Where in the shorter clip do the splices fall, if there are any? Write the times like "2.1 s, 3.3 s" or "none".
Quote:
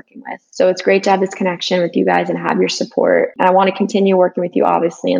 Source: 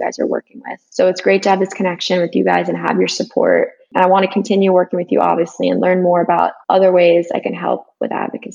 3.3 s

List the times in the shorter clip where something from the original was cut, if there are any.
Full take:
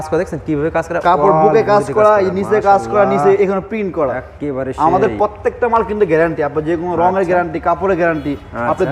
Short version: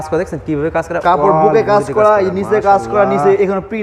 none

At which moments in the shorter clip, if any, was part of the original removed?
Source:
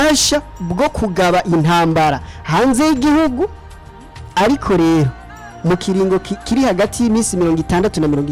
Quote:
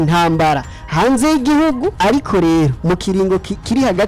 1.9 s, 2.8 s

